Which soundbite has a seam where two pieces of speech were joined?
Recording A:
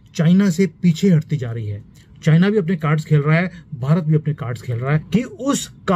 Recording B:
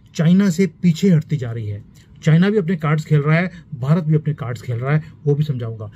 A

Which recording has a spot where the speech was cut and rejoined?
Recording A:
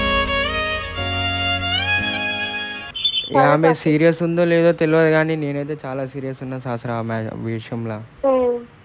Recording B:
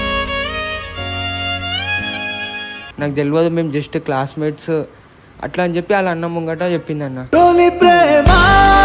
B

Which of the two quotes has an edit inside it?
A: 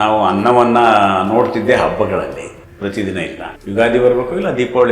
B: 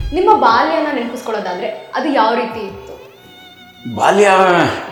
A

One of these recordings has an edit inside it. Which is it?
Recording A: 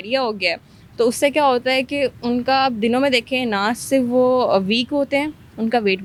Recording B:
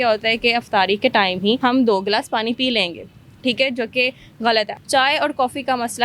B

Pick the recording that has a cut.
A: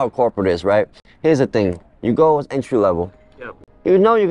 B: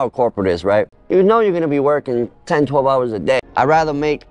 B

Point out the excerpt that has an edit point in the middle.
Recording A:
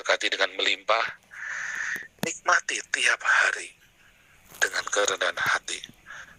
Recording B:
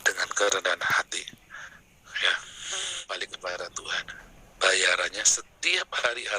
B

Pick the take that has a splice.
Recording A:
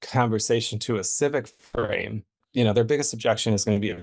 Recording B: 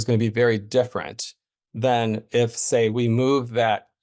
A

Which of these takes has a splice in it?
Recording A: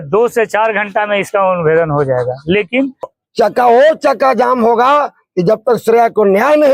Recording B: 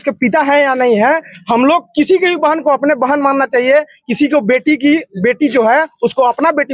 A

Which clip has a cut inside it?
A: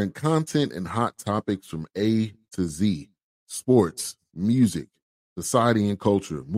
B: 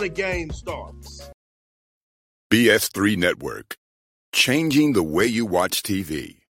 B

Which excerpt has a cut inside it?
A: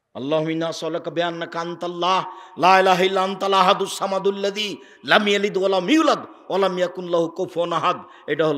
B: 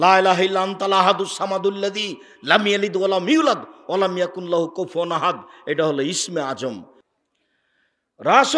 B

